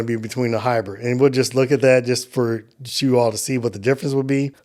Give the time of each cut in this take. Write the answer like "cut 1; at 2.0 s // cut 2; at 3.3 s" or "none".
none

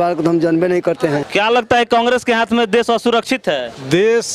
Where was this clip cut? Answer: cut 1; at 1.2 s

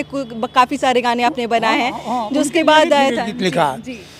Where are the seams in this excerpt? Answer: none

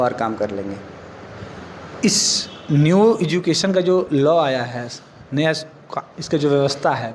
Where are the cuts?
none

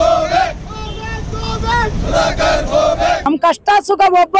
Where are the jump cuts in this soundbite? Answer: cut 1; at 3.2 s

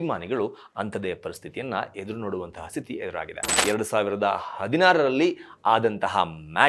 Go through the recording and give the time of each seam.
cut 1; at 3.6 s

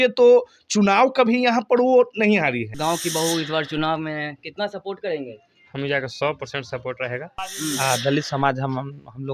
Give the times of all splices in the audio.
cut 1; at 2.7 s // cut 2; at 7.4 s

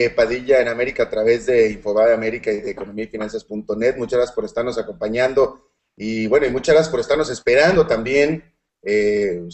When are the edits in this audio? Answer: none

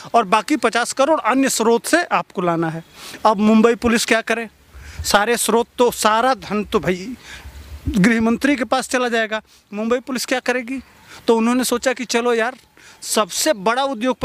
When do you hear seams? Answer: none

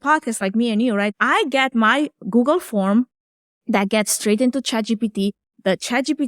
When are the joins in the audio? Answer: cut 1; at 1.1 s

